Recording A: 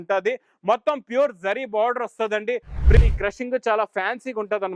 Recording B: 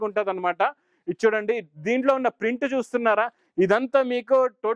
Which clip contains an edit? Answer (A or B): A